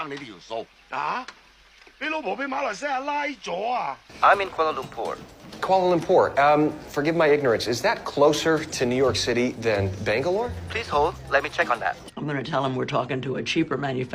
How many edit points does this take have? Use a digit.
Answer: 0